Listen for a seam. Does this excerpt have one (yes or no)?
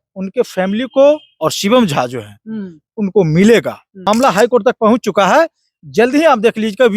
yes